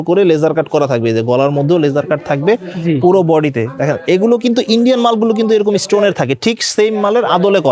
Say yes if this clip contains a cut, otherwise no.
no